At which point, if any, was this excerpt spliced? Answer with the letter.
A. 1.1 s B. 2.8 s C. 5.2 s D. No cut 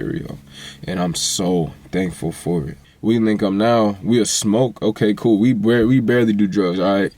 B